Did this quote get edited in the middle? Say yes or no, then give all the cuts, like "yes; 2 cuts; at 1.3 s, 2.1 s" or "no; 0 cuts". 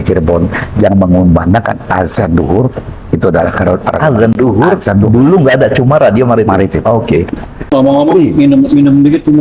yes; 1 cut; at 7.7 s